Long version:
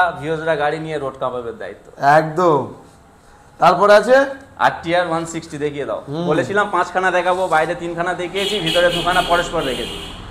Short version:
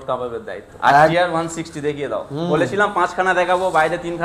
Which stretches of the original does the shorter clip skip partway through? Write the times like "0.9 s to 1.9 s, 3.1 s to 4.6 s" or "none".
2.2 s to 4.9 s